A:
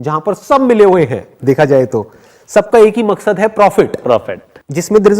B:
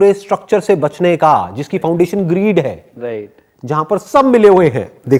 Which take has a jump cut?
A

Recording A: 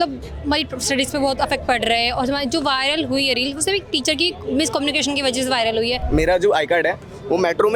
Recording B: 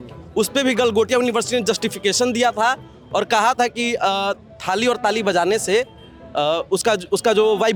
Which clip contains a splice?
A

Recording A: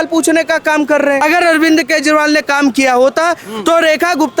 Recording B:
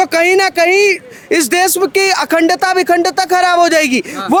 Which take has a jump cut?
A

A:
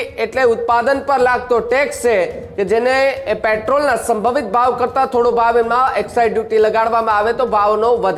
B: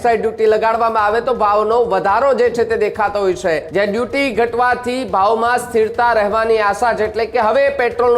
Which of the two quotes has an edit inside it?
B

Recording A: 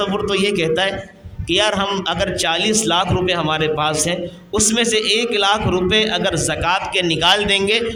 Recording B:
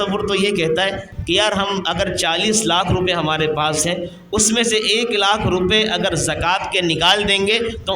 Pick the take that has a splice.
B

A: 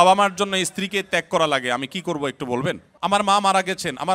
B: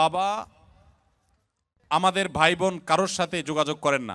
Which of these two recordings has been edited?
A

